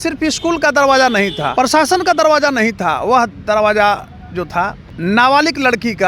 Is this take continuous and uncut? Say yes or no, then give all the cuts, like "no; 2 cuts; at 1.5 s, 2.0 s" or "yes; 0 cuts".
no; 2 cuts; at 1.4 s, 4.9 s